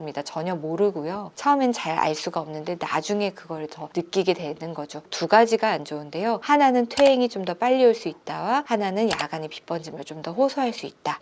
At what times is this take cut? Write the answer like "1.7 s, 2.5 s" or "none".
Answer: 1.3 s, 5.0 s